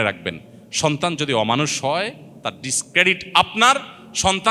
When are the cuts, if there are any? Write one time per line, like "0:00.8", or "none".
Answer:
none

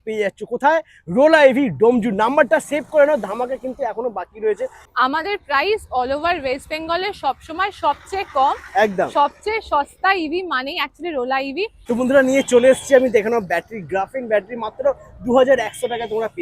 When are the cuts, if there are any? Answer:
0:04.8
0:11.8

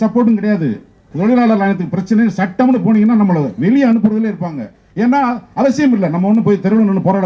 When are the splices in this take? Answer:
0:01.0

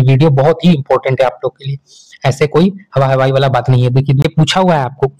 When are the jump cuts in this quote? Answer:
0:04.2

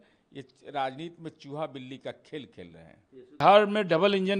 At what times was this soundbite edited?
0:03.4

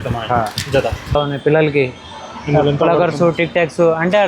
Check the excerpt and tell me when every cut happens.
0:01.1

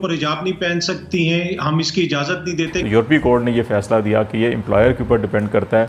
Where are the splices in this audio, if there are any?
0:02.8

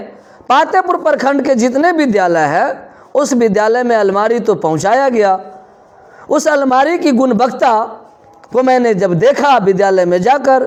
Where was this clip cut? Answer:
none

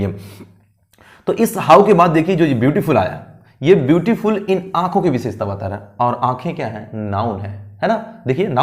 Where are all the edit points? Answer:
none

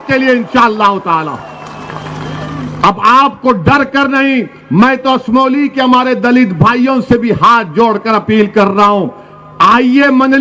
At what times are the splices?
none

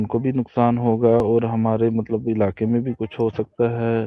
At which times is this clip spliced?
none

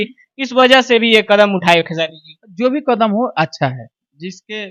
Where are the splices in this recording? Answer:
none

